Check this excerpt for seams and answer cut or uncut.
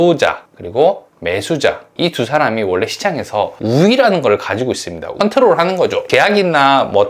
cut